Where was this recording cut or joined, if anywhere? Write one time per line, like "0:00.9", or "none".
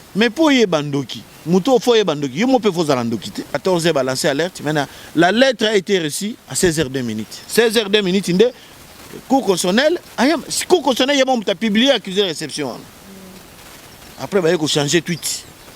0:03.5